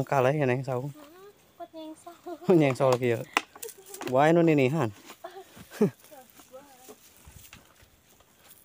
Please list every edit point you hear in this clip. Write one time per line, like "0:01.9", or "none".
none